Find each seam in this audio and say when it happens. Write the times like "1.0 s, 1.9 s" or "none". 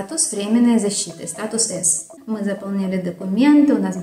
2.2 s